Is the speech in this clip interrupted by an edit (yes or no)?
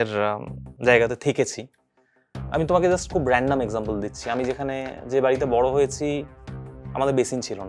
no